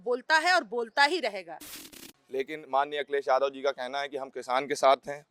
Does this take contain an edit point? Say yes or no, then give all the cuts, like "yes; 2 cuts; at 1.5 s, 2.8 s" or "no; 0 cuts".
yes; 1 cut; at 1.8 s